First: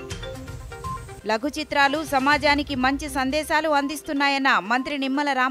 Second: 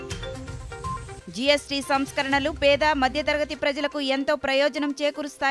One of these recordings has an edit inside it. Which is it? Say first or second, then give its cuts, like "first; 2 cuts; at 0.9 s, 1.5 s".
first; 1 cut; at 1.1 s